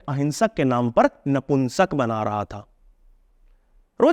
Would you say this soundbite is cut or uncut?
uncut